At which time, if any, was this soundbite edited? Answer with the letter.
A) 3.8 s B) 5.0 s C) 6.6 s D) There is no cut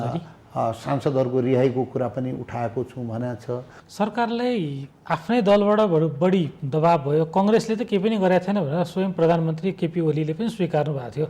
A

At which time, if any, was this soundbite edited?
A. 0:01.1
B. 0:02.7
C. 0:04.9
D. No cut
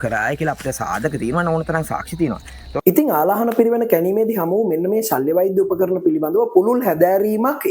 B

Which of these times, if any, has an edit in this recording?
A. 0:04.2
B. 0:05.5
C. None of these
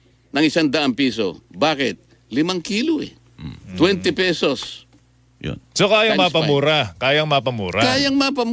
C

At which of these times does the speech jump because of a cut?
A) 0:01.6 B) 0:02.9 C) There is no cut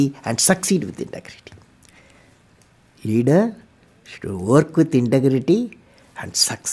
C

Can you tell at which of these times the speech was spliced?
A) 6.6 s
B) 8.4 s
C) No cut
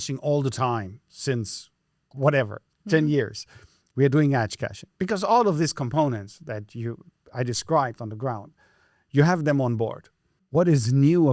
C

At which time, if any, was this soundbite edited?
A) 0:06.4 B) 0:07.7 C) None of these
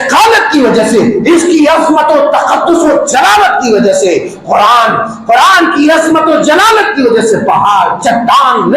C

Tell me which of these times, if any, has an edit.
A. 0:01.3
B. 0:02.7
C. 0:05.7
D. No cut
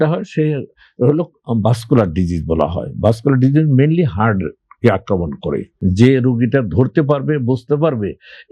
C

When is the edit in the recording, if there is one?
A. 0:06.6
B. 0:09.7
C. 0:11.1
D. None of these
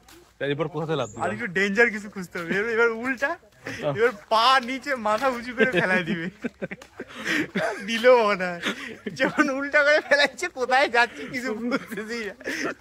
D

